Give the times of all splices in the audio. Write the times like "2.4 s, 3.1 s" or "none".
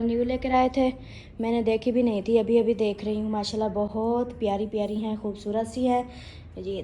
none